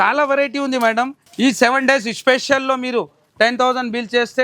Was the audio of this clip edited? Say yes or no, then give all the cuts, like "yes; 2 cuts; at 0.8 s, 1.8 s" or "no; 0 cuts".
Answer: yes; 1 cut; at 1.2 s